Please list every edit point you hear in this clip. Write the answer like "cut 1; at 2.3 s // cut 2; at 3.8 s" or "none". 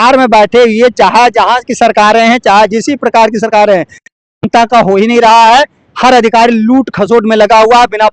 none